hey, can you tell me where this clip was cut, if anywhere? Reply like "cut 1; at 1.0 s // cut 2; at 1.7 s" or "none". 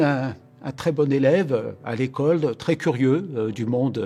none